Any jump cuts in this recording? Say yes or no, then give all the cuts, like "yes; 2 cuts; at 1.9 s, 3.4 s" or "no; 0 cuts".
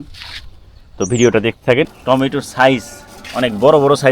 yes; 1 cut; at 2.0 s